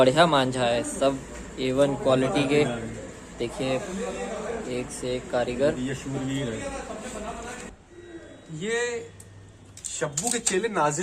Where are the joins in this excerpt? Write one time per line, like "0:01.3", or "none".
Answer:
0:07.7

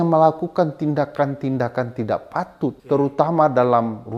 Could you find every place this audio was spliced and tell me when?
0:02.8

